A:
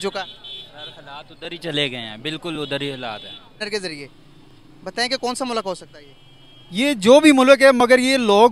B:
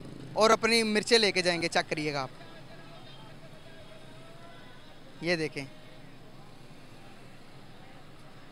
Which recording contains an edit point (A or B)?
A